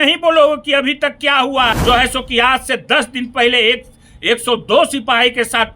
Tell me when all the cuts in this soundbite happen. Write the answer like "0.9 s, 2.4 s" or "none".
1.8 s

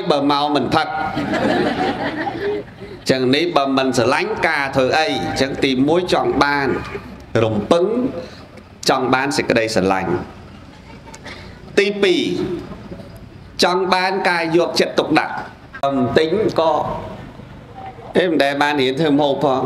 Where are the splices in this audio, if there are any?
15.8 s

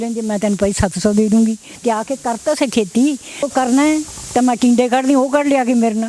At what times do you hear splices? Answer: 3.5 s

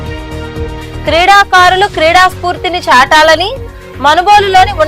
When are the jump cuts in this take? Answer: none

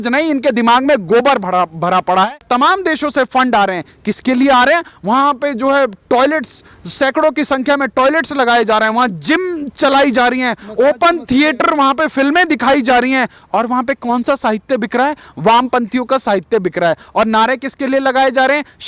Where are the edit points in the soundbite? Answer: 2.4 s

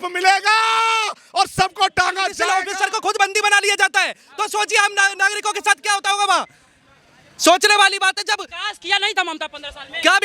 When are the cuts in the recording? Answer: 2.4 s

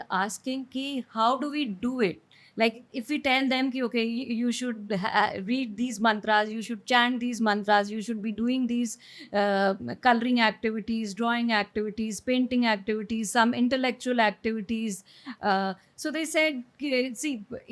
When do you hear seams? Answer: none

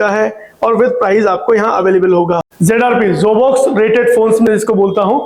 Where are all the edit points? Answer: 2.5 s

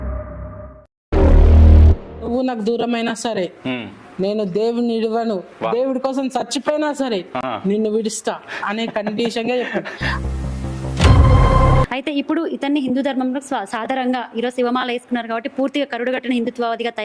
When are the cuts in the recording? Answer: 2.3 s, 11.9 s

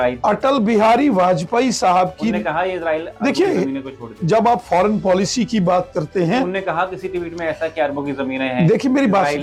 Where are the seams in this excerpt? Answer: none

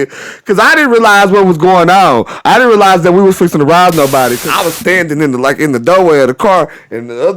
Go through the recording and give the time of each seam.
4.4 s

